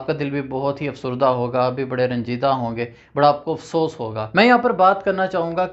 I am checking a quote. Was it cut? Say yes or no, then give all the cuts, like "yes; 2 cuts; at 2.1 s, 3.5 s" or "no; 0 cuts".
yes; 1 cut; at 4.2 s